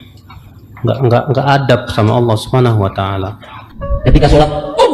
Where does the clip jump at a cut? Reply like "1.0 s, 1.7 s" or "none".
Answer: 3.6 s